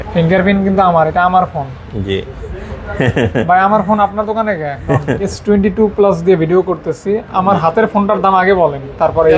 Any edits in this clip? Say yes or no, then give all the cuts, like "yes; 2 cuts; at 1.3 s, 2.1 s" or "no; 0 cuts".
yes; 1 cut; at 5.4 s